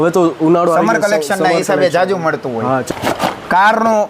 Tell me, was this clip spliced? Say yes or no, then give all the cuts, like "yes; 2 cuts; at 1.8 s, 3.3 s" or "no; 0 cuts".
yes; 1 cut; at 2.9 s